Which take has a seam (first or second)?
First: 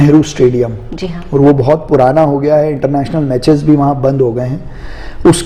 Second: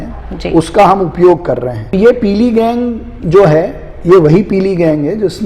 second